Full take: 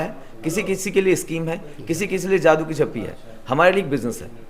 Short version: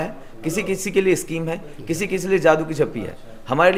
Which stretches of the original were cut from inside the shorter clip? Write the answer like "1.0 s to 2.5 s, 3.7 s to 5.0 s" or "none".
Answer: none

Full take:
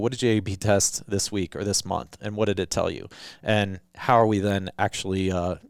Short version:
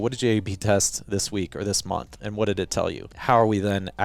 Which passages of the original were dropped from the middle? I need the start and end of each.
3.1 s to 3.9 s

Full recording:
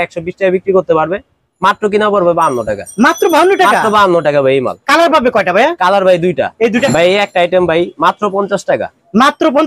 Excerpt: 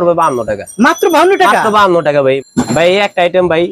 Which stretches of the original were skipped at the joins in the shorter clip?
4.8 s to 6.8 s

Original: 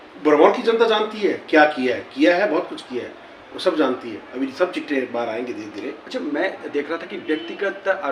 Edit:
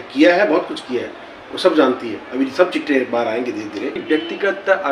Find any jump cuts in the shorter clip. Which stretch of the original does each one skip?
6.0 s to 7.2 s

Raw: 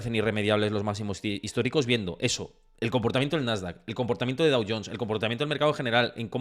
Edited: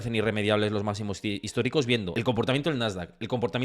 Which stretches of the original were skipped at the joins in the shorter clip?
2.1 s to 2.8 s

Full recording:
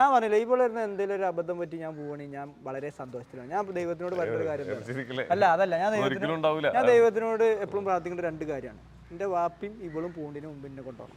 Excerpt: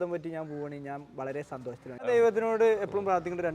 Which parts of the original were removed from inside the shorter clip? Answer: 3.5 s to 6.8 s

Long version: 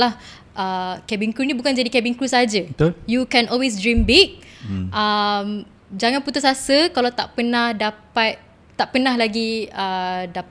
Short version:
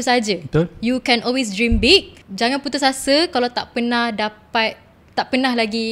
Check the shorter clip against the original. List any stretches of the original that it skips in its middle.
4.5 s to 5.8 s

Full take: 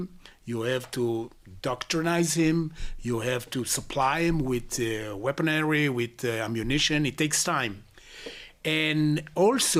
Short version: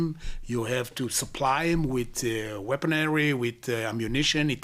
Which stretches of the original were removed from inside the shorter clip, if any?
none

